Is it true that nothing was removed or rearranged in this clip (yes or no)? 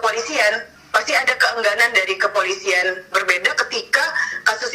no